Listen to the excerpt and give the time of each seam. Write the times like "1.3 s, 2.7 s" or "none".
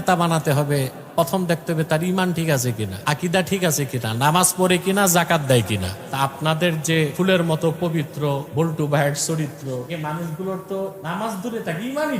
2.9 s, 6.0 s, 7.1 s, 8.5 s, 9.9 s, 11.0 s